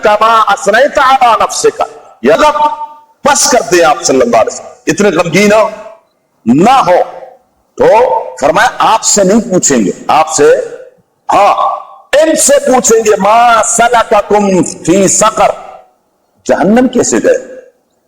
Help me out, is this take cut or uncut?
cut